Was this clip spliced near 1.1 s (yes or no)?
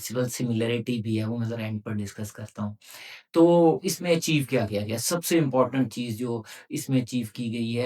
no